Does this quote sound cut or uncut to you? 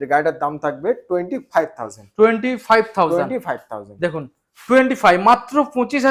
uncut